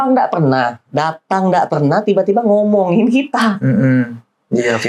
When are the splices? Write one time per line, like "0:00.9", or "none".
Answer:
none